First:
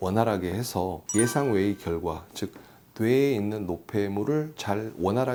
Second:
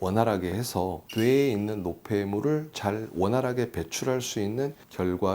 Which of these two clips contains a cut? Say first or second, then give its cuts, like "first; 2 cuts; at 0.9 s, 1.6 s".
second; 1 cut; at 1.0 s